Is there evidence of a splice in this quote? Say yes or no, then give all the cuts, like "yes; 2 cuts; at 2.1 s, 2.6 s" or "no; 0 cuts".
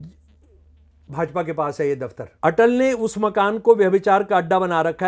yes; 1 cut; at 2.2 s